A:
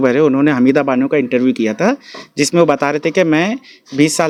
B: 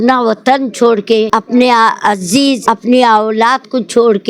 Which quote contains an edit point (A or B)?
B